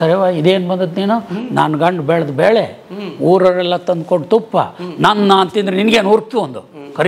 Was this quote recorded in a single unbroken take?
yes; 0 cuts

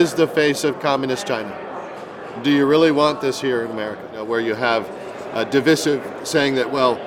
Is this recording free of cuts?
no; 1 cut; at 4.1 s

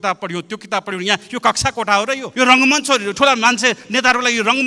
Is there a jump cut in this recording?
no; 0 cuts

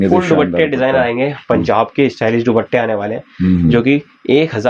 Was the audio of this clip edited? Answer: no; 0 cuts

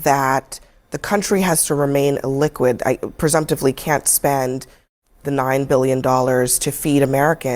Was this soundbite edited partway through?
no; 0 cuts

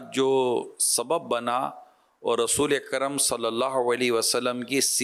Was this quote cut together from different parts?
no; 0 cuts

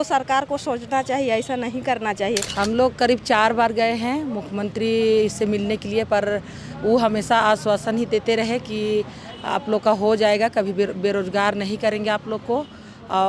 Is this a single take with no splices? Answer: no; 1 cut; at 2.5 s

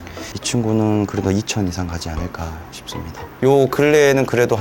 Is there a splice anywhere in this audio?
yes; 1 cut; at 3.4 s

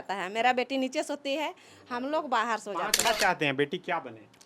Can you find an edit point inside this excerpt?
yes; 1 cut; at 3.0 s

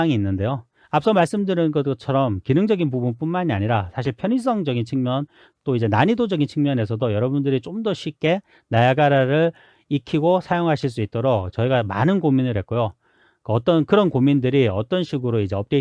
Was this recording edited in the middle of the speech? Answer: no; 0 cuts

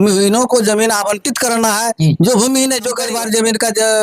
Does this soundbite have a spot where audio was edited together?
yes; 1 cut; at 3.1 s

